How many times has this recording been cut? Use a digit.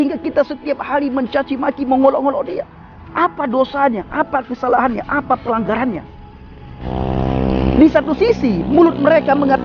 1